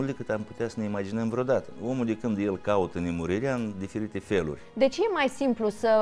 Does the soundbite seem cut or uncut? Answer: cut